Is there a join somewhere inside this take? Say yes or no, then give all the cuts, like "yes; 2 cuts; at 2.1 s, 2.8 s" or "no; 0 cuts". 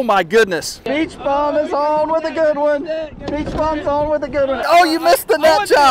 yes; 2 cuts; at 0.8 s, 4.6 s